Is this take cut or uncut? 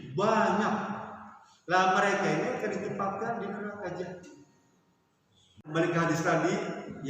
cut